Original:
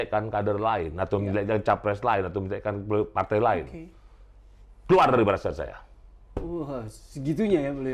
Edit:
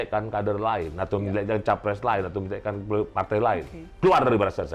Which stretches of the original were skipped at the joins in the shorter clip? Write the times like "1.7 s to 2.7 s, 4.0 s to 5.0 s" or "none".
3.8 s to 4.7 s